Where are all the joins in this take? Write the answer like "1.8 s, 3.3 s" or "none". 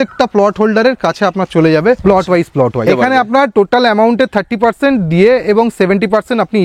2.9 s